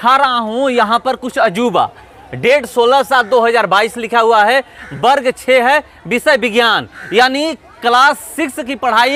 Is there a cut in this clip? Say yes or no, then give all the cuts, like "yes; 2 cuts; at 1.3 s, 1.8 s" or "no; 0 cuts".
no; 0 cuts